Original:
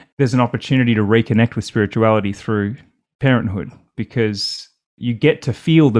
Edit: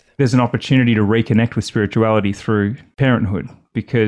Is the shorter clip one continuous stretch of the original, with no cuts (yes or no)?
no